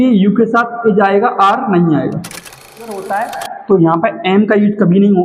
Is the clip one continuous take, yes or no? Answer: no